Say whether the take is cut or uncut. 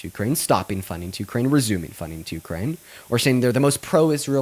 uncut